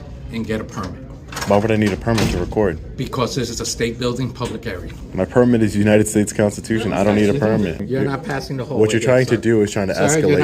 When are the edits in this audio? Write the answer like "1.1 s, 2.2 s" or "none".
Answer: 5.0 s, 7.8 s